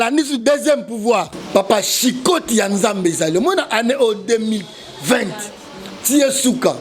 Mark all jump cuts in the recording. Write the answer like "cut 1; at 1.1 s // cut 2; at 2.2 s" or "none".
cut 1; at 1.4 s